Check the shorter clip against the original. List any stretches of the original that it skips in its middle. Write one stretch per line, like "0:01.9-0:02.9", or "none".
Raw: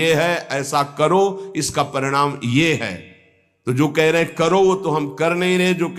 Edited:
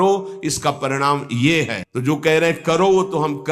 0:03.0-0:03.6